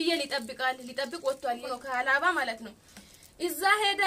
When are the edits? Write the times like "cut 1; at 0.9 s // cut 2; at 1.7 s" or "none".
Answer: cut 1; at 1.6 s